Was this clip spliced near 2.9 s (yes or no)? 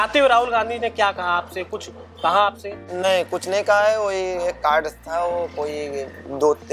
yes